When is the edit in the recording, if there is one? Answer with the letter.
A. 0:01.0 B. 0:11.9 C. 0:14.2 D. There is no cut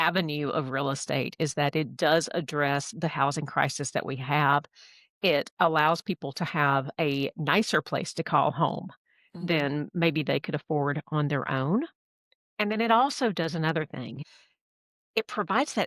C